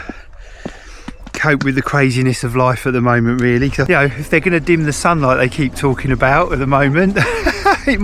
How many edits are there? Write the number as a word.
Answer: one